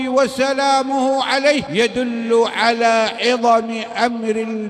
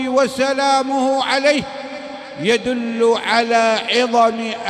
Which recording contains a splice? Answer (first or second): first